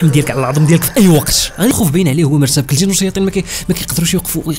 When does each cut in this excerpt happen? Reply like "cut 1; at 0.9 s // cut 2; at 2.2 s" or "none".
cut 1; at 1.7 s